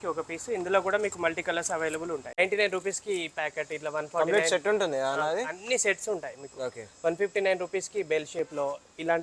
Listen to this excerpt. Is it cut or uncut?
cut